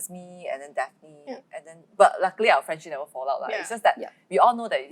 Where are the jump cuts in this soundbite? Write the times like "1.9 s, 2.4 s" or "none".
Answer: none